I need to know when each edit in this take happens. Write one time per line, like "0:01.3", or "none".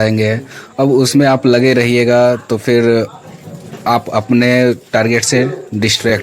none